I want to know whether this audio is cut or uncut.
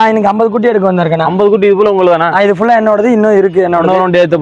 uncut